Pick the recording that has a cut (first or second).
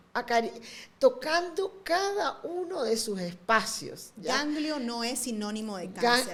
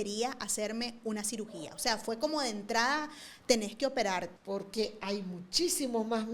second